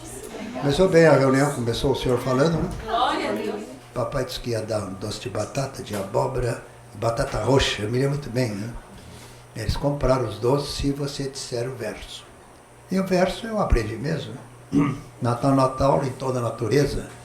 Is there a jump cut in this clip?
yes; 1 cut; at 3.6 s

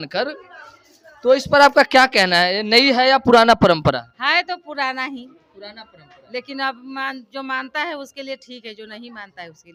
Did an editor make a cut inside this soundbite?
no; 0 cuts

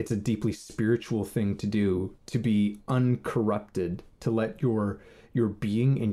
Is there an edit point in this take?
no; 0 cuts

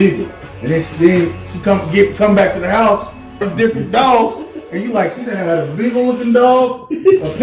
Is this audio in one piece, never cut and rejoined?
no; 1 cut; at 3.5 s

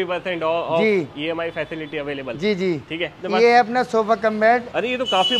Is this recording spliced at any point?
yes; 1 cut; at 3.2 s

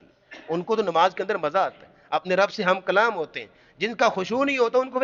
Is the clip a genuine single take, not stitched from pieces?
yes; 0 cuts

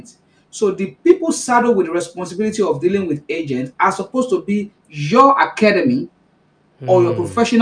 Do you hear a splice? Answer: no; 0 cuts

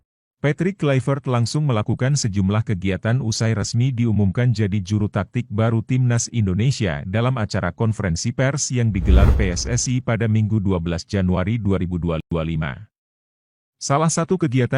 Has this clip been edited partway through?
no; 0 cuts

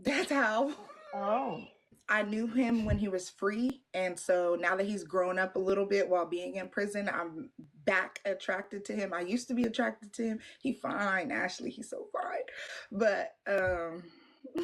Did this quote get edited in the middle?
yes; 1 cut; at 1.9 s

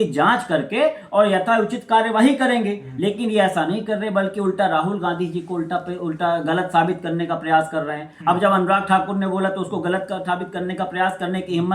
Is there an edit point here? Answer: no; 0 cuts

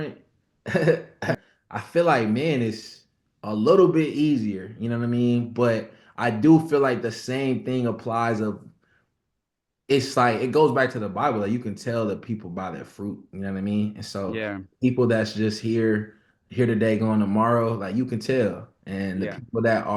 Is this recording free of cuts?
no; 1 cut; at 1.4 s

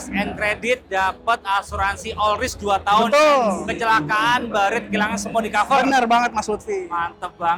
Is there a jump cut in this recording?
no; 0 cuts

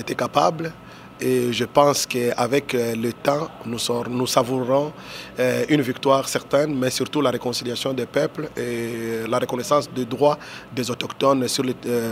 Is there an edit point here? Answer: no; 0 cuts

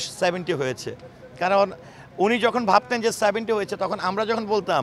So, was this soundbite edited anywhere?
no; 0 cuts

